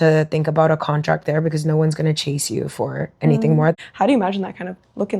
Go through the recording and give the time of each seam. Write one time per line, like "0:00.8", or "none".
0:03.7

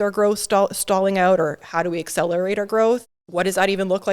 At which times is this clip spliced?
0:03.0

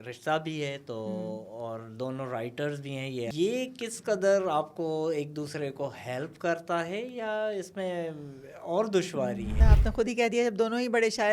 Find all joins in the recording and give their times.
0:03.3
0:09.6

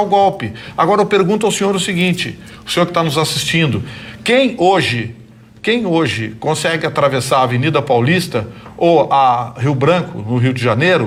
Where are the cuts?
none

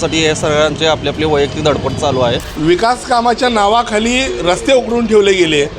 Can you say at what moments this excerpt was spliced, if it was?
0:02.5

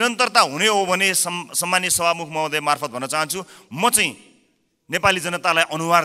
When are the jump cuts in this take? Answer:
none

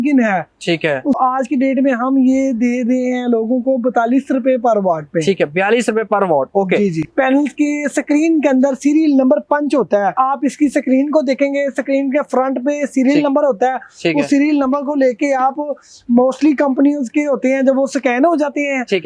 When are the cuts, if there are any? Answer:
0:01.2
0:07.0
0:10.2

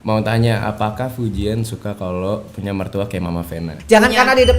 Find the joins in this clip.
0:03.7

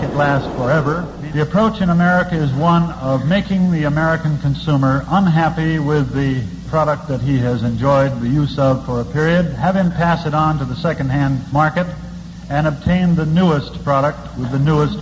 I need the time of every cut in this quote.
0:01.1

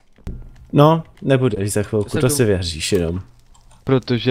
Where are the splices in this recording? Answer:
none

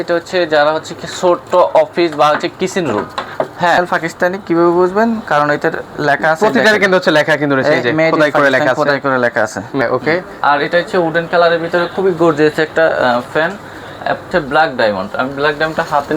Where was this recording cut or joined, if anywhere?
0:03.8
0:09.8
0:14.3

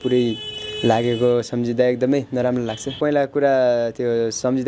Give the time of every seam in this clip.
0:03.0

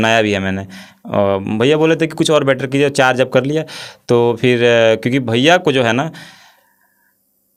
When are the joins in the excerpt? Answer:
none

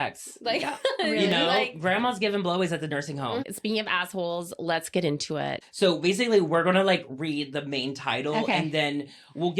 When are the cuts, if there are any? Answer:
0:03.4

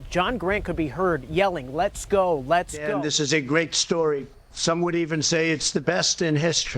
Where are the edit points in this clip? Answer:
0:02.9

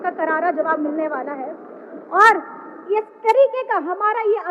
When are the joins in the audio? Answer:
none

